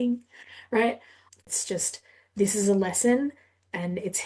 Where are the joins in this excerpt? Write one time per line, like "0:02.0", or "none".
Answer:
0:01.3